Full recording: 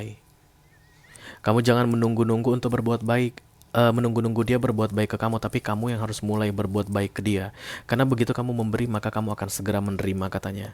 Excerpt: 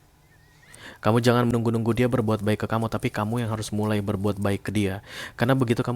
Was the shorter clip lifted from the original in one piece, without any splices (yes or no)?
no